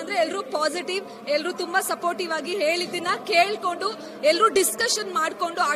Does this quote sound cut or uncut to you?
uncut